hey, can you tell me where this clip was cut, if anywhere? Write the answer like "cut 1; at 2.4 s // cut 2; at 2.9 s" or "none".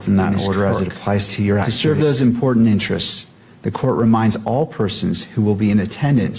cut 1; at 1.7 s

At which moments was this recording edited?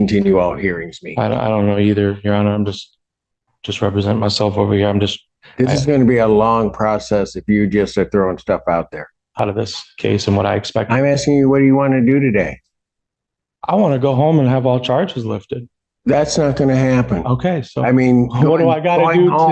cut 1; at 9.3 s

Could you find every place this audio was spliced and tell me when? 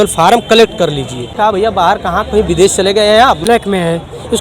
cut 1; at 1.3 s // cut 2; at 3.1 s

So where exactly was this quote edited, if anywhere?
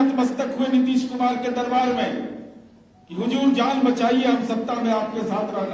none

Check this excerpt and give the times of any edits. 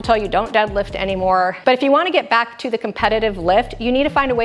cut 1; at 1.6 s

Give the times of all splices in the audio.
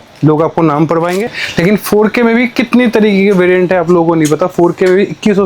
cut 1; at 1.3 s

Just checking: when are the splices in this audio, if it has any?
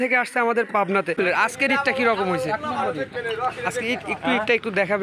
cut 1; at 1.1 s

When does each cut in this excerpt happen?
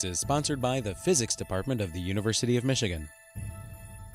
cut 1; at 3.2 s

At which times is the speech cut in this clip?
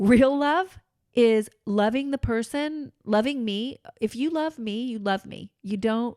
none

